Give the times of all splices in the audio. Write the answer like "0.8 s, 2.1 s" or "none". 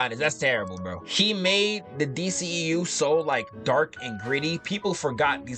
1.0 s